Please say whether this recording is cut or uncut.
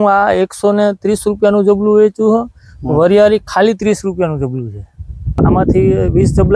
cut